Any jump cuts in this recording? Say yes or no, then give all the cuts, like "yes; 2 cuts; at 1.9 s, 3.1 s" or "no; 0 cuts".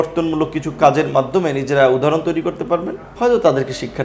yes; 1 cut; at 3.0 s